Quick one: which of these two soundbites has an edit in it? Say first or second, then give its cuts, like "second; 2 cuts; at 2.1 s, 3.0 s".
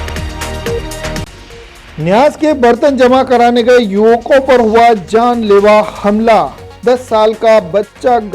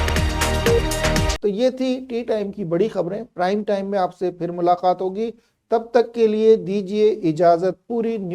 first; 1 cut; at 1.2 s